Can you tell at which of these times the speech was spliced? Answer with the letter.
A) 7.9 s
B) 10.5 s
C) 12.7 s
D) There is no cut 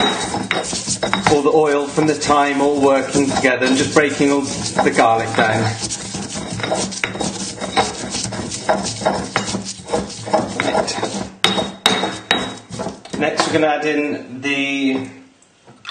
D